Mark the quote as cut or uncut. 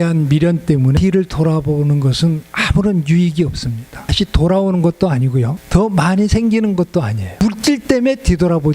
cut